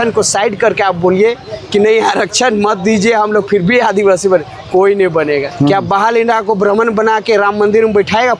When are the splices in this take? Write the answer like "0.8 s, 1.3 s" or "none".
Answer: 5.5 s